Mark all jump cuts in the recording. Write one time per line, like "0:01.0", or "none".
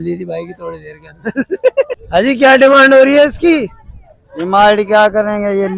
0:02.0